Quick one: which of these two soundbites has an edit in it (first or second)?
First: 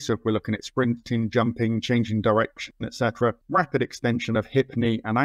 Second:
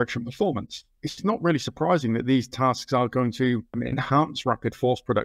second